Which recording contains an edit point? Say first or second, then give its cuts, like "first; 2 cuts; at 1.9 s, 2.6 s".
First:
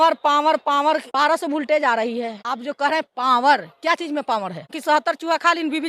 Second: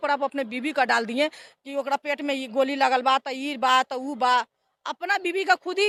first; 2 cuts; at 1.1 s, 4.8 s